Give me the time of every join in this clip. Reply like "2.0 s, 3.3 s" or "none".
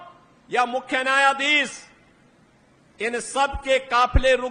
none

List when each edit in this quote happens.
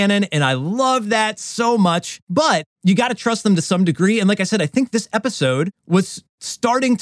2.4 s, 6.0 s

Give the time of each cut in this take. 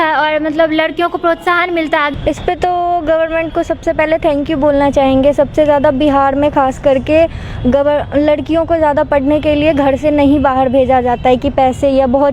2.1 s

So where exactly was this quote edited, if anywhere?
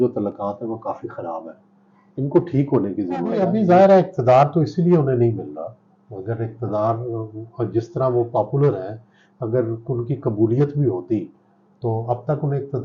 3.4 s

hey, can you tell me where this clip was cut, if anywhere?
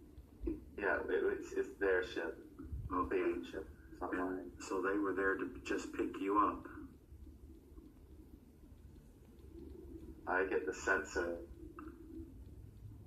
none

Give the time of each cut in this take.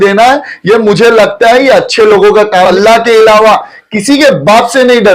2.7 s

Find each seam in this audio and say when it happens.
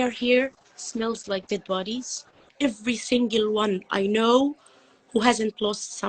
2.5 s

